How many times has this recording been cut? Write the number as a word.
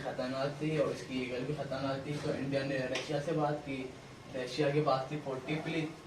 zero